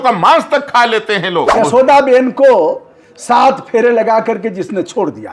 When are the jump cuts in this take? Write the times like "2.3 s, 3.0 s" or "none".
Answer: 1.5 s